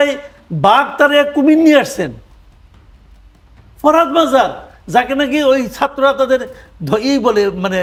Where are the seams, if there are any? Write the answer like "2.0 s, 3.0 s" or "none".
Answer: none